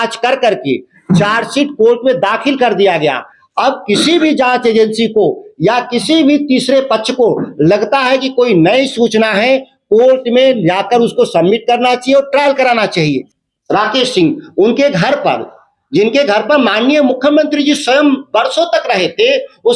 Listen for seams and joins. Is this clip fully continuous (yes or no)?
no